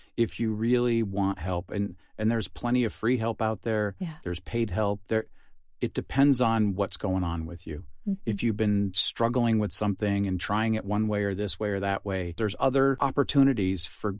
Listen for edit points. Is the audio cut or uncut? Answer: cut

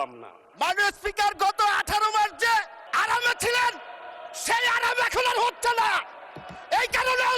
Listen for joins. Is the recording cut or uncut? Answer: cut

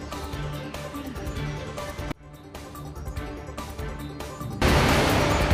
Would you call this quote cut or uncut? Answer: uncut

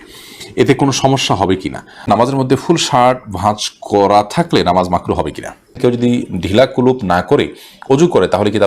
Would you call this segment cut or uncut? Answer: cut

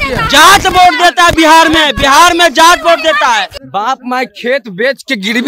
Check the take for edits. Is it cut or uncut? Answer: cut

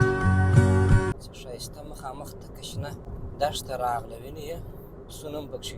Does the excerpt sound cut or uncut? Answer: cut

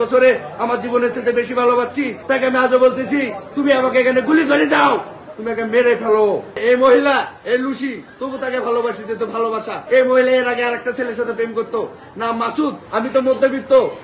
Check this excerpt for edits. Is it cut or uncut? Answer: cut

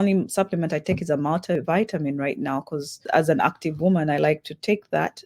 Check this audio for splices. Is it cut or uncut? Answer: cut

